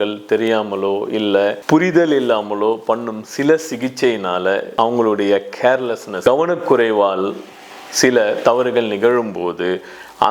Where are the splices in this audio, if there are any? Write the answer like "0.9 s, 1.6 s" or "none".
1.6 s, 4.7 s, 6.1 s